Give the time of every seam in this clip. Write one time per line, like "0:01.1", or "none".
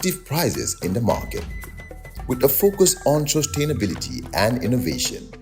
0:01.3